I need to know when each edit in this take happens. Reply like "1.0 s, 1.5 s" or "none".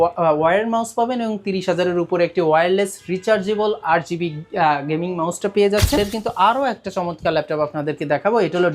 6.0 s